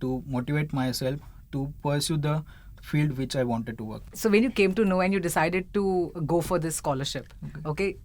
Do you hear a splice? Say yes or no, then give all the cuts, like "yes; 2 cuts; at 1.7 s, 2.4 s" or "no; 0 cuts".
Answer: no; 0 cuts